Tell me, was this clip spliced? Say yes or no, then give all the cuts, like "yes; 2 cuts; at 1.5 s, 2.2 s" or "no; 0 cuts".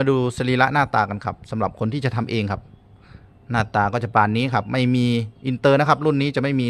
no; 0 cuts